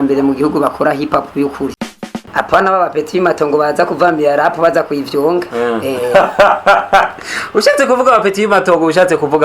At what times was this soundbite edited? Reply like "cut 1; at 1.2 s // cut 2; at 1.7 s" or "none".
cut 1; at 1.9 s